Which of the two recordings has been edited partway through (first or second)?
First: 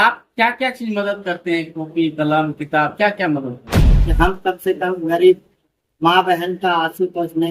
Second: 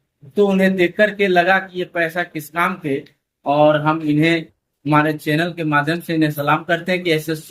first